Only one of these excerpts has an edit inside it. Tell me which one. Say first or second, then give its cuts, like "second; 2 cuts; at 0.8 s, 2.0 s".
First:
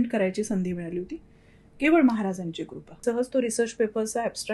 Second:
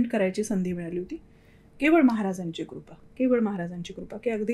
first; 1 cut; at 2.8 s